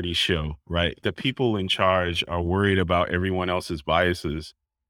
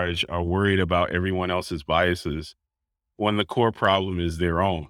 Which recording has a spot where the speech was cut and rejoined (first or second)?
first